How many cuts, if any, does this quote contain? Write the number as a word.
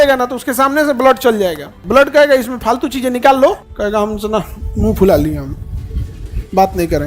two